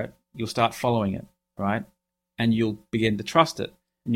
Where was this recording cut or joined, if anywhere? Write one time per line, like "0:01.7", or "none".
none